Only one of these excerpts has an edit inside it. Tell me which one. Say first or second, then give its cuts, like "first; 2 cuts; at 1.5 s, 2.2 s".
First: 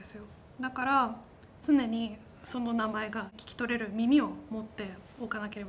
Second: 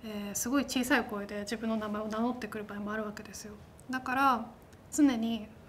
first; 1 cut; at 3.4 s